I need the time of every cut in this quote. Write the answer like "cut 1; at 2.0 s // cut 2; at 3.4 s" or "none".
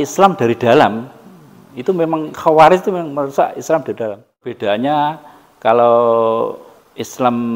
cut 1; at 4.6 s